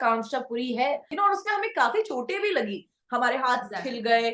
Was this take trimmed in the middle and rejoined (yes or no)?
yes